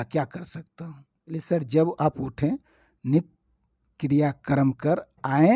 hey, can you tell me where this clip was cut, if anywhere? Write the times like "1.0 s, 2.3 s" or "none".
1.3 s